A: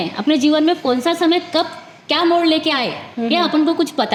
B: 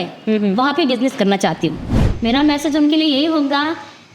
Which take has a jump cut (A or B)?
B